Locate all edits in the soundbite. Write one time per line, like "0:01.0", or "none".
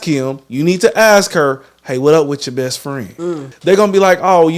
0:03.5

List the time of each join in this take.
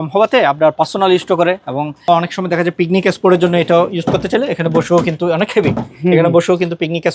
0:01.9

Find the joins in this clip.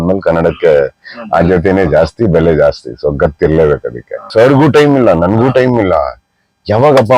0:04.2

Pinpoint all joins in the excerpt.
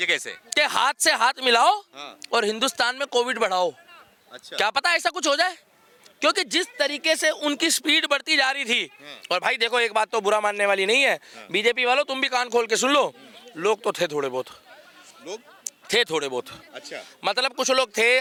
none

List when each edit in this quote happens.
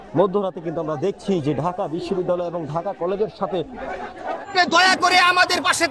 0:04.5

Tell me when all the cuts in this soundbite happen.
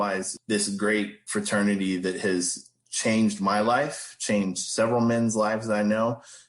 0:01.2

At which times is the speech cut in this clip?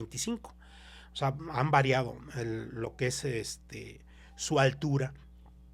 none

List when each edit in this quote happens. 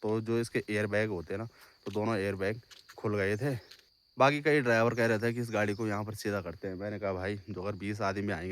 0:04.0

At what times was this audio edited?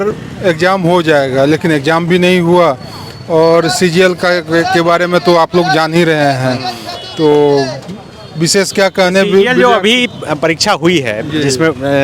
none

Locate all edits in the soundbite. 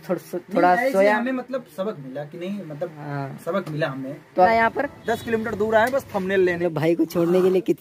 0:04.5
0:06.6

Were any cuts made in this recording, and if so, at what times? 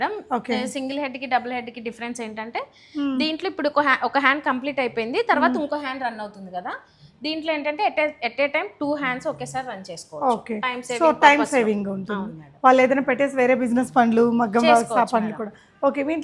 none

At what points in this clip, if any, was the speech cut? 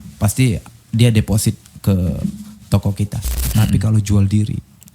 0:03.5

